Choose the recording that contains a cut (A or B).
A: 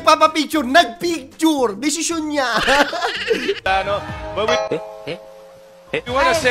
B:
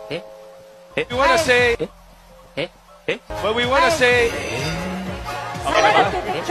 B